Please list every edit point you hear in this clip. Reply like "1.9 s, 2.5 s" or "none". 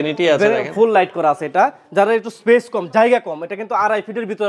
none